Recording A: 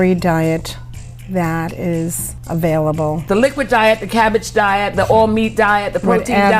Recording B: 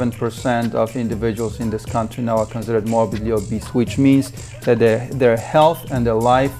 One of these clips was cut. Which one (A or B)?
A